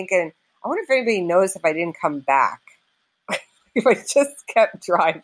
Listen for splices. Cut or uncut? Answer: uncut